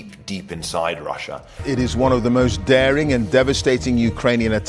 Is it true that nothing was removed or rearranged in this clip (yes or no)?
no